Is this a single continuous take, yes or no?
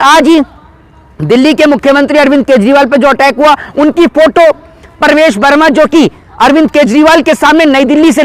yes